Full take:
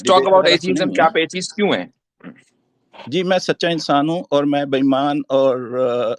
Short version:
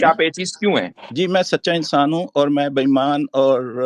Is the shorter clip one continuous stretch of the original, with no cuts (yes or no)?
no